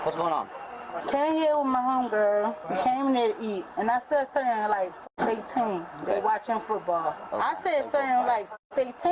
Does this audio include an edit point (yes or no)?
no